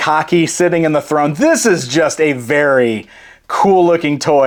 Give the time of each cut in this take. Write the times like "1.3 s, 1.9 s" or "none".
none